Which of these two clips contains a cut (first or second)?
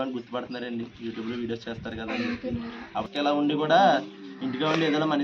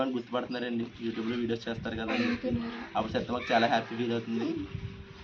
first